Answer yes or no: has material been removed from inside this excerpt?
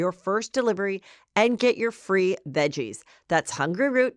no